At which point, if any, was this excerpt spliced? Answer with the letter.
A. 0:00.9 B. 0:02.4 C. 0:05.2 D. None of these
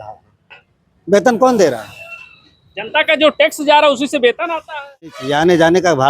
C